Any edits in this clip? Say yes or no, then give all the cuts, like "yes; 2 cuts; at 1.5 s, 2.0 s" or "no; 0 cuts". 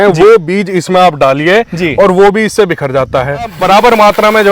yes; 1 cut; at 3.6 s